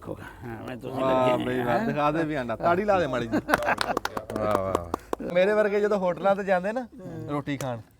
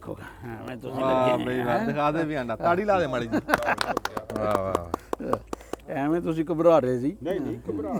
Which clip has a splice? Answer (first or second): first